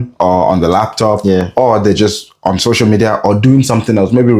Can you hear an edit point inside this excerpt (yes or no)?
no